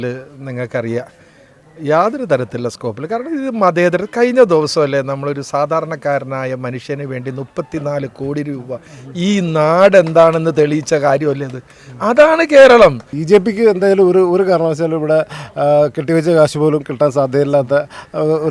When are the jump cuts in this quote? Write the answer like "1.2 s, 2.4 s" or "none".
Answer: 13.1 s